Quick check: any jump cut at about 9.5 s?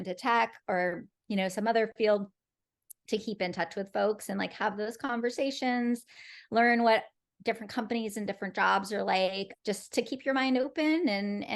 yes; 1 cut; at 9.5 s

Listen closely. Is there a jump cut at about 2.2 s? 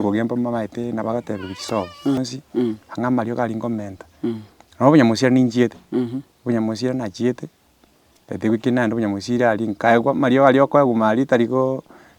yes; 1 cut; at 2.2 s

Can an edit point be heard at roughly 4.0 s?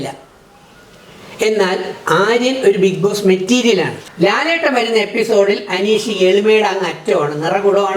yes; 1 cut; at 4.0 s

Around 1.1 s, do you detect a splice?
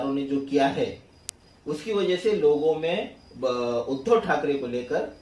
no; 0 cuts

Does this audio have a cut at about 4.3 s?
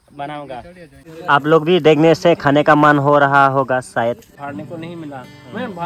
yes; 2 cuts; at 1.1 s, 4.3 s

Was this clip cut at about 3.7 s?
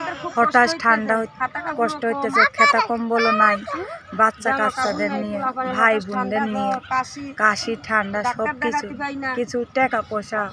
no; 0 cuts

